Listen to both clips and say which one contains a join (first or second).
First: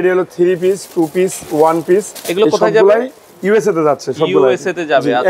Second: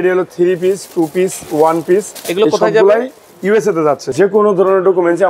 second